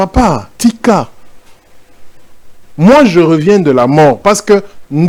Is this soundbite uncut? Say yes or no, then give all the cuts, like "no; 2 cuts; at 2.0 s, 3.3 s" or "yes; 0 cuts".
yes; 0 cuts